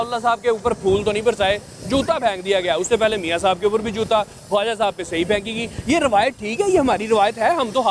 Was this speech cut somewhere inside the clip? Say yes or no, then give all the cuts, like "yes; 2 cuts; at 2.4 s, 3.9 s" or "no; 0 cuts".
no; 0 cuts